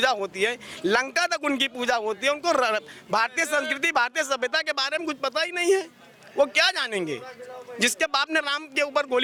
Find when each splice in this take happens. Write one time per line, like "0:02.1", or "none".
none